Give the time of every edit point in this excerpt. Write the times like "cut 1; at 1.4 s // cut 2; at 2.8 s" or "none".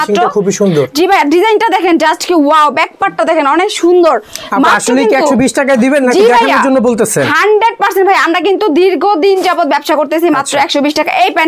none